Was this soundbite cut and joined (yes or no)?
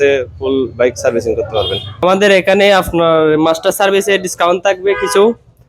yes